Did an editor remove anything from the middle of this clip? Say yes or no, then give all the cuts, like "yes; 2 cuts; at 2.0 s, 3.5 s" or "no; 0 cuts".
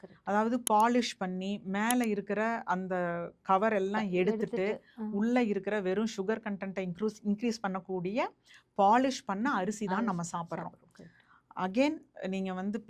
no; 0 cuts